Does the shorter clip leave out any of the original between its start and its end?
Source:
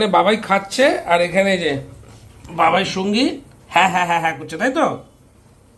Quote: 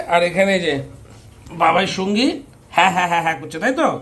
no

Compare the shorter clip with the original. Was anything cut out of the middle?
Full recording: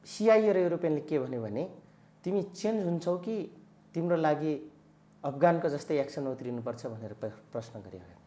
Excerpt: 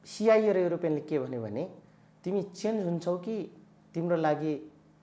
no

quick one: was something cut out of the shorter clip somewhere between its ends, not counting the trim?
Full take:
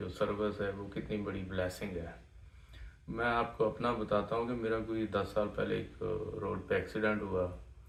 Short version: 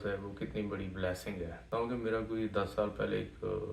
yes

